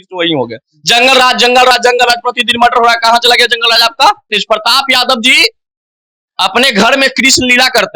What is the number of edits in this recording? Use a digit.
1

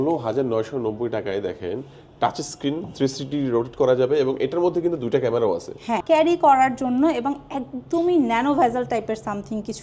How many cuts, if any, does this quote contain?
1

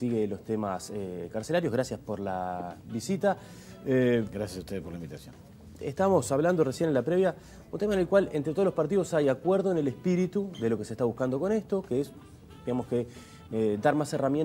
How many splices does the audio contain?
0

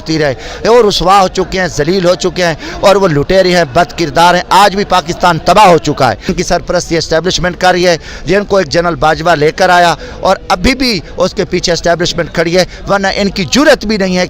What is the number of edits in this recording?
1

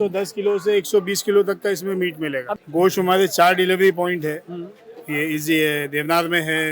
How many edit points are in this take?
1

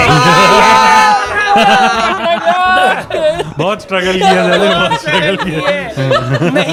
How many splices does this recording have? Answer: 0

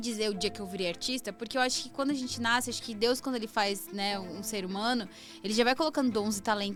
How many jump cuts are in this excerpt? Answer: 0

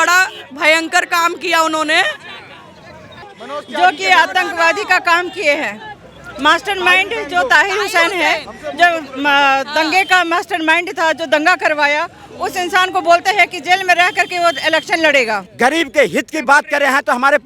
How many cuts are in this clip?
2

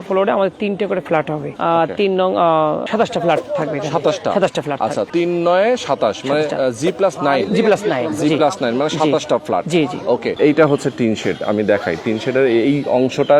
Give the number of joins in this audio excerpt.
4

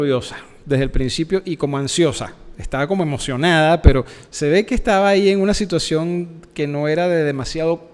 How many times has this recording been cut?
0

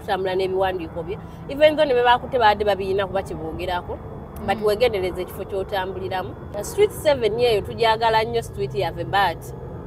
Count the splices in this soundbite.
1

